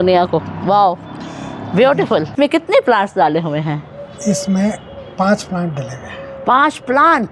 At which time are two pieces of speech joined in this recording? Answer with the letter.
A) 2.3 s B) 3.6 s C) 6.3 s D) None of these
A